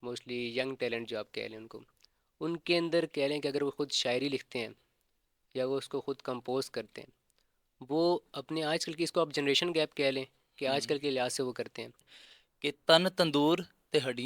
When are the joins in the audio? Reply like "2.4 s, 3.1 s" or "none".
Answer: 12.1 s